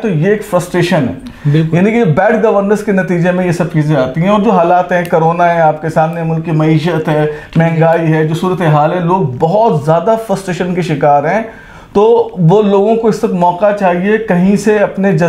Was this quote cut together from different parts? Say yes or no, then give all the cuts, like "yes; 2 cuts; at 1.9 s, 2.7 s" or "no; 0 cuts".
no; 0 cuts